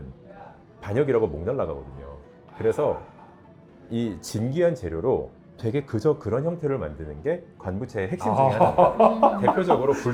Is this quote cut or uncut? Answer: uncut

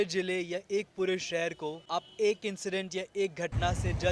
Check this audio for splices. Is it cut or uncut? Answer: uncut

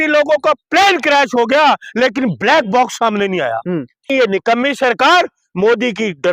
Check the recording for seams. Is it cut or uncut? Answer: cut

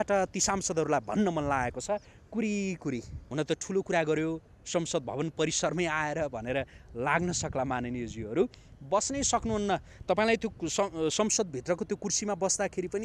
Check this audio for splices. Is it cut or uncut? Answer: cut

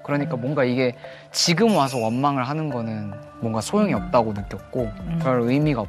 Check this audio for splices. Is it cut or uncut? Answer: uncut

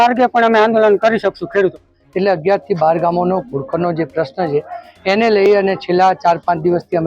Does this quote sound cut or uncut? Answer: cut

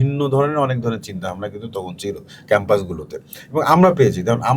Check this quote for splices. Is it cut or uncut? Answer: uncut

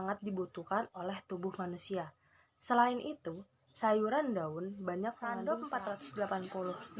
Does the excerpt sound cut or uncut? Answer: cut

